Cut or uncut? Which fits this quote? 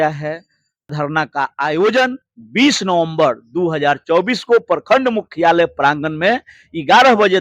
cut